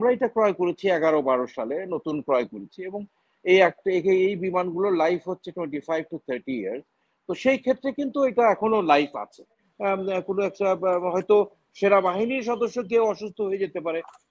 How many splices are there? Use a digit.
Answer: 1